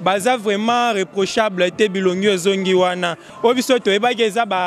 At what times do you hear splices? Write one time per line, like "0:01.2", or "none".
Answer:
0:03.2